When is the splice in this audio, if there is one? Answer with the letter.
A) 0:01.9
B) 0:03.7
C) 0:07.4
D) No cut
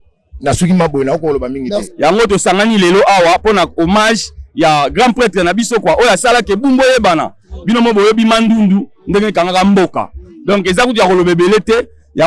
A